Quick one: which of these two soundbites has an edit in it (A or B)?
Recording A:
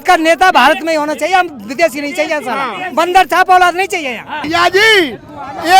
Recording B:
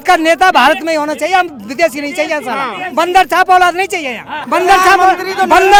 A